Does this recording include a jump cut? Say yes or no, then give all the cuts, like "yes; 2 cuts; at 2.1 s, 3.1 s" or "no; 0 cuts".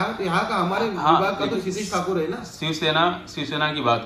no; 0 cuts